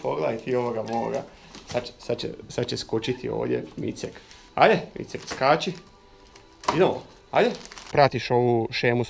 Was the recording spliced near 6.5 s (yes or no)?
no